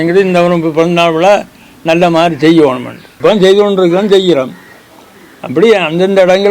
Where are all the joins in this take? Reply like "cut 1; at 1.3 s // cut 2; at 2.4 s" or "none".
cut 1; at 3.1 s